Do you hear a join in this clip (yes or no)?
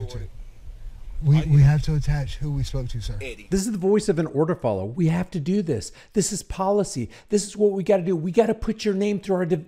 no